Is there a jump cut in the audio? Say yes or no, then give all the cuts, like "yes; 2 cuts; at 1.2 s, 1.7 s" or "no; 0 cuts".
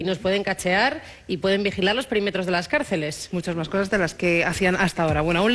yes; 1 cut; at 3.0 s